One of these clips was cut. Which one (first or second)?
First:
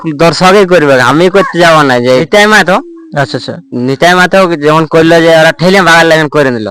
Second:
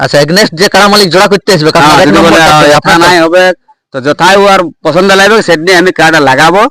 first